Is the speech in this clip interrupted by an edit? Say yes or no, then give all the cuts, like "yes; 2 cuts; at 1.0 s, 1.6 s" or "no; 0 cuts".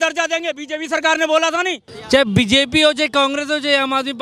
yes; 1 cut; at 1.9 s